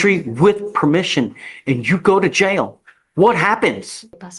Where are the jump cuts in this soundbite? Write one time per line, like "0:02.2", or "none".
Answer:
none